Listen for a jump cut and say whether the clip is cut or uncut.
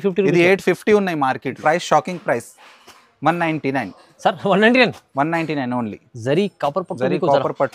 cut